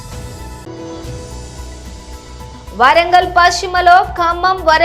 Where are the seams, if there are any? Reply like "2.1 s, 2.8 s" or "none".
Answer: none